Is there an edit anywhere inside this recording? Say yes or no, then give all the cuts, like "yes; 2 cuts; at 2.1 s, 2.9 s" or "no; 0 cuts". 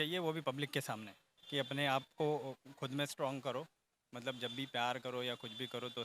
yes; 1 cut; at 1.4 s